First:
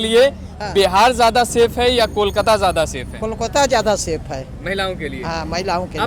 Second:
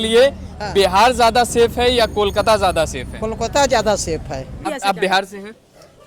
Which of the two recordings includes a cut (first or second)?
second